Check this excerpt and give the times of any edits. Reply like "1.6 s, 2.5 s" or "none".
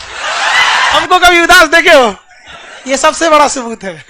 1.0 s